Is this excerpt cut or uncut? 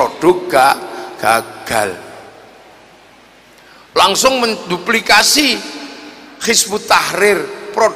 uncut